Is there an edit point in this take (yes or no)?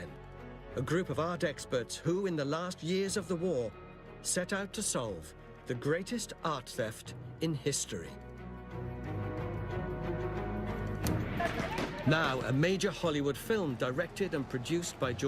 yes